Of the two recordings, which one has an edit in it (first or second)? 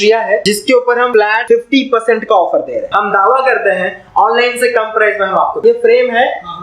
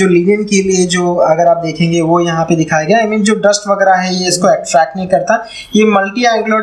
first